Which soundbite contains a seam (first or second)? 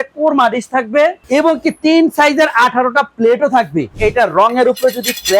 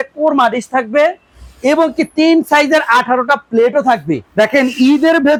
first